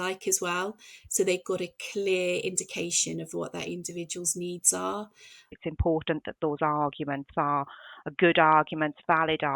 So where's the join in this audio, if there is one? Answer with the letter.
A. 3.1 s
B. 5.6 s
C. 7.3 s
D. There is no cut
B